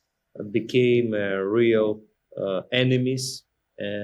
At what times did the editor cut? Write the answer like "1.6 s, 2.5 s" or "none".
none